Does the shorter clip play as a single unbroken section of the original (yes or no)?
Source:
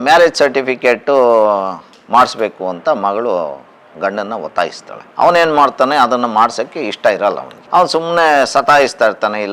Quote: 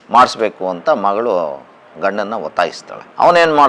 yes